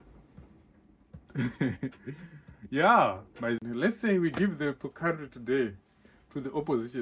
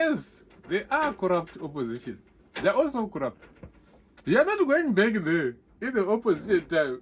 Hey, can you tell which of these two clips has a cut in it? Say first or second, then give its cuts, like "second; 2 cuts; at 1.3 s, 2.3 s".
first; 1 cut; at 3.6 s